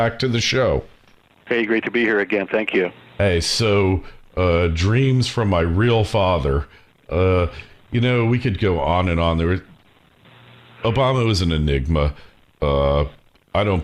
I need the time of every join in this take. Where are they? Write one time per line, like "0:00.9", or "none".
none